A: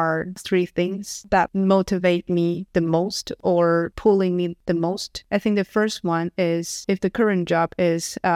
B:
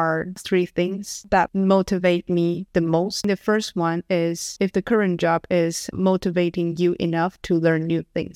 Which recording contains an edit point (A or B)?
B